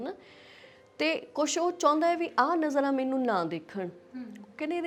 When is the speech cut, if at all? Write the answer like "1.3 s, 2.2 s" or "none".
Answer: none

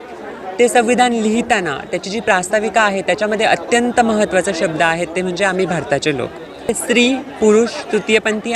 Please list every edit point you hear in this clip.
6.7 s

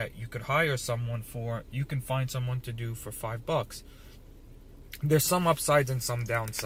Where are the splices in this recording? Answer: none

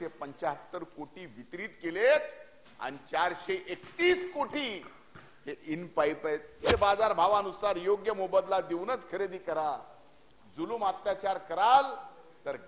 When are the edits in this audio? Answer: 6.6 s

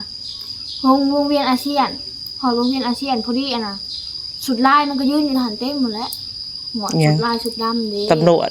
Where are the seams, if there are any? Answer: none

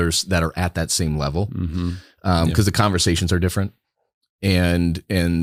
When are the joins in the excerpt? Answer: none

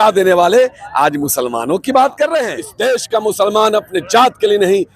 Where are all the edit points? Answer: 2.6 s

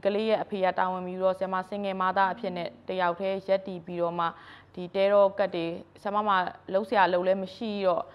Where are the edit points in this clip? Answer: none

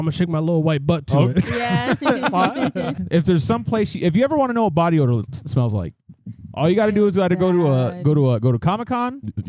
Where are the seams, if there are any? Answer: 3.0 s

